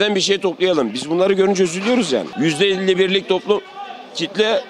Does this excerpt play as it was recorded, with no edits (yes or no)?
no